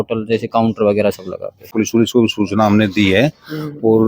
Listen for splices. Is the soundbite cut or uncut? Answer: cut